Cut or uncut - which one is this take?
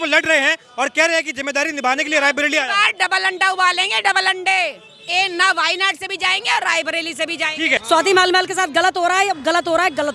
cut